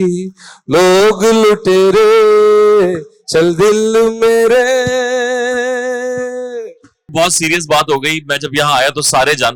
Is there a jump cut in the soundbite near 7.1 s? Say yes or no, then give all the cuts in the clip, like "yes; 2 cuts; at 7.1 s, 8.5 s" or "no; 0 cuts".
yes; 1 cut; at 7.1 s